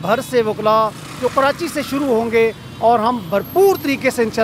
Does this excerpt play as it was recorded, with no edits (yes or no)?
yes